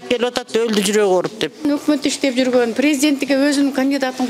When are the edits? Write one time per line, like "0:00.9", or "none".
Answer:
0:01.6